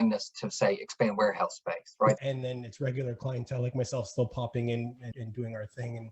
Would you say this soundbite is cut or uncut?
cut